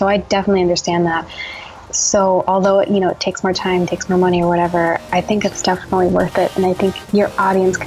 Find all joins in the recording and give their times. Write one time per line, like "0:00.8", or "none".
none